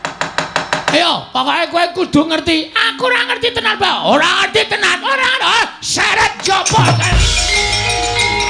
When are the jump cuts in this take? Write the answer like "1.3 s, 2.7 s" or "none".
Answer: none